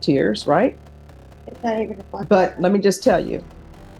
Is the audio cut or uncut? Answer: uncut